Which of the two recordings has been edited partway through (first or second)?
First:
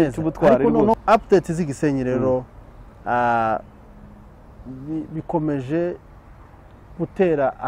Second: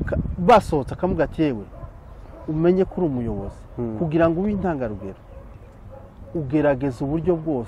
first